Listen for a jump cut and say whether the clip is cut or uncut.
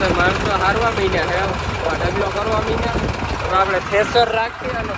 uncut